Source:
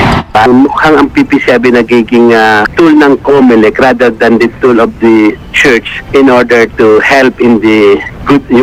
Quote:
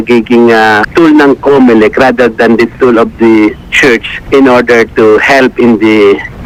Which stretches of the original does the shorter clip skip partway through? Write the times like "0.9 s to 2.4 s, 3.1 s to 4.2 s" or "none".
none